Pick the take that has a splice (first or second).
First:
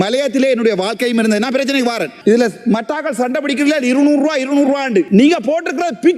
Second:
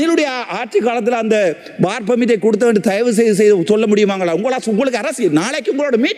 first